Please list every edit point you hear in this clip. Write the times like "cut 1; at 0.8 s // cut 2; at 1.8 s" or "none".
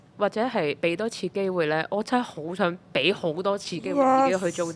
none